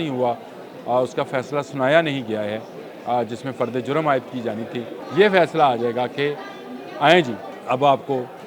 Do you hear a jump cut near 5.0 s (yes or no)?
yes